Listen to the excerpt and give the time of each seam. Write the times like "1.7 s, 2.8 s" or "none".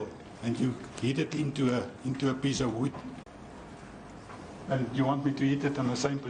none